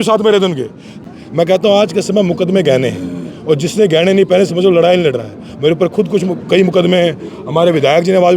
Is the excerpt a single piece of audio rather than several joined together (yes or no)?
no